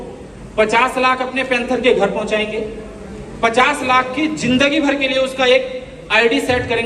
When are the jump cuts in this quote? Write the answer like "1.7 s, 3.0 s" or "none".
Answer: none